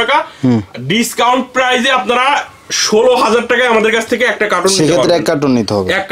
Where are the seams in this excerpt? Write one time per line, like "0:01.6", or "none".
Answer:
none